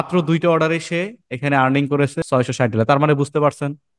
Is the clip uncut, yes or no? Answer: no